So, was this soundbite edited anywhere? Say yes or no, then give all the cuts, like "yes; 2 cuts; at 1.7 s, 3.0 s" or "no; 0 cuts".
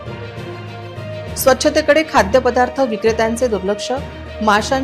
no; 0 cuts